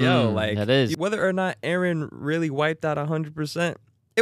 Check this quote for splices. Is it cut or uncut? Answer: cut